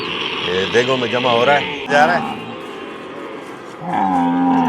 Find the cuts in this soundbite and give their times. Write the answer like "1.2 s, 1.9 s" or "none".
1.9 s